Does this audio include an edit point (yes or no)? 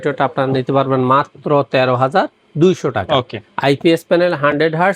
no